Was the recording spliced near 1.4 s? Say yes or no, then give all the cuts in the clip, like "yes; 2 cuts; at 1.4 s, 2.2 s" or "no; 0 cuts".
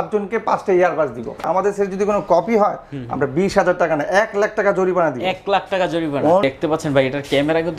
yes; 2 cuts; at 1.4 s, 6.4 s